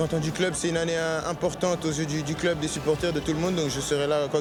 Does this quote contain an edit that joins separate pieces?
no; 0 cuts

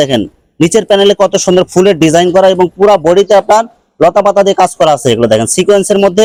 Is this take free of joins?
yes; 0 cuts

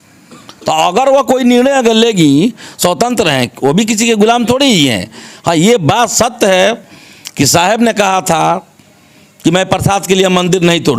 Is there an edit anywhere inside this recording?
no; 0 cuts

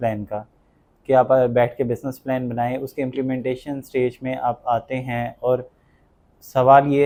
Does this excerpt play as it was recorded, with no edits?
yes; 0 cuts

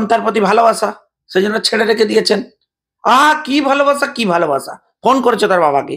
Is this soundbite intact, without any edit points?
yes; 0 cuts

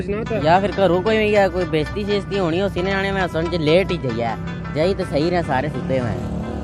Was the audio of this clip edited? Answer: no; 0 cuts

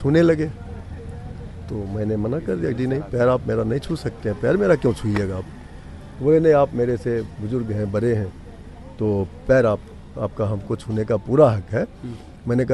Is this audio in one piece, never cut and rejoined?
yes; 0 cuts

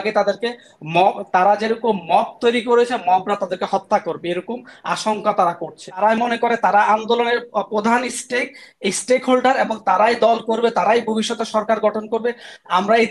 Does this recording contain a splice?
yes; 1 cut; at 6.0 s

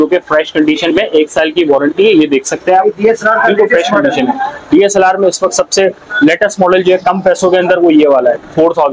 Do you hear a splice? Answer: no; 0 cuts

